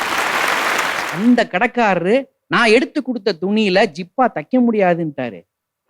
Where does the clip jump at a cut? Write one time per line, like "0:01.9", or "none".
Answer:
0:01.0